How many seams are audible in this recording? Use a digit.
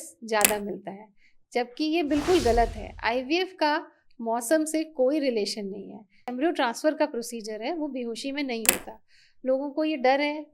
1